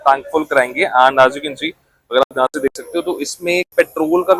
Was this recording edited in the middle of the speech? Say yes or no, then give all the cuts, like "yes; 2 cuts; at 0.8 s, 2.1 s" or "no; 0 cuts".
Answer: no; 0 cuts